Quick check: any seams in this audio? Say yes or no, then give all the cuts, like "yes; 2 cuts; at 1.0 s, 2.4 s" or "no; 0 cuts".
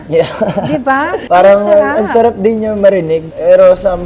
yes; 1 cut; at 1.2 s